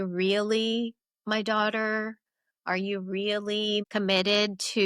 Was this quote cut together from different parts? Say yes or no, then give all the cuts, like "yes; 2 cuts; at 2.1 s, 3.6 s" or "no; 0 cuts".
no; 0 cuts